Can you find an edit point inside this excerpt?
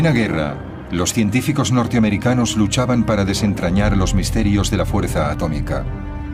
no; 0 cuts

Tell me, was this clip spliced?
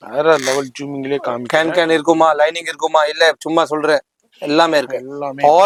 no; 0 cuts

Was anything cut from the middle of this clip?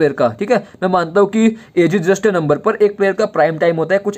no; 0 cuts

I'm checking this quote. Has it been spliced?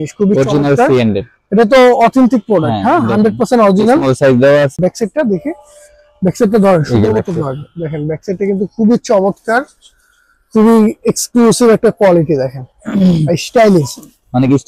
yes; 1 cut; at 4.7 s

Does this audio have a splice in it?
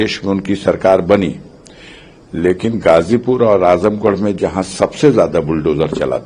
no; 0 cuts

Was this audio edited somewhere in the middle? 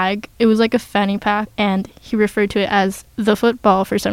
yes; 1 cut; at 1.5 s

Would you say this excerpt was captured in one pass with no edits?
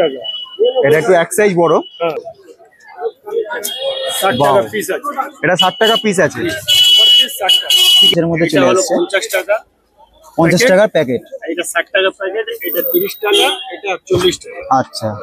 no; 2 cuts; at 2.2 s, 8.1 s

